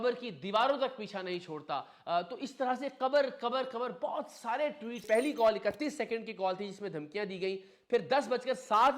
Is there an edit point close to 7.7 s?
no; 1 cut; at 5.0 s

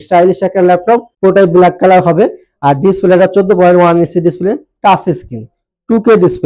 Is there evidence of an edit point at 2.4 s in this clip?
no; 1 cut; at 1.1 s

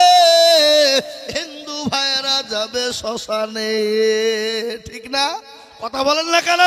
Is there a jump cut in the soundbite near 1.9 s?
no; 0 cuts

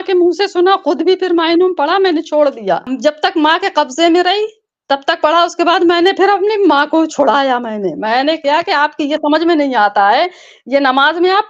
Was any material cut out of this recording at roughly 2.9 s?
yes; 1 cut; at 2.9 s

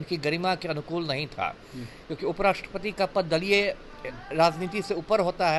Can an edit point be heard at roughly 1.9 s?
no; 0 cuts

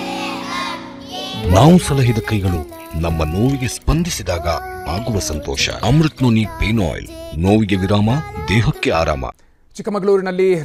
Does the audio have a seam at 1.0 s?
no; 0 cuts

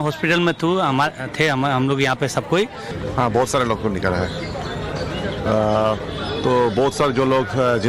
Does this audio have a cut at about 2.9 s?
yes; 2 cuts; at 1.2 s, 2.9 s

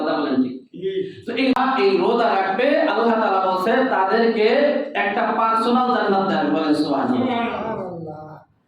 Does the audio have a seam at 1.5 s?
yes; 1 cut; at 1.5 s

